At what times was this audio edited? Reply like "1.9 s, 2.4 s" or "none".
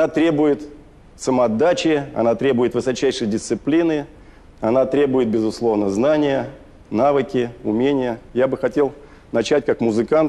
3.6 s